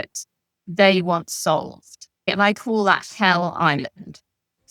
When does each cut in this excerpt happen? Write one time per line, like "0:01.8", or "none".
0:02.3